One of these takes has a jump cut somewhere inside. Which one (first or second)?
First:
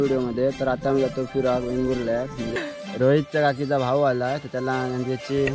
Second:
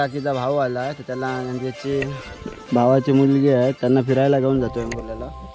first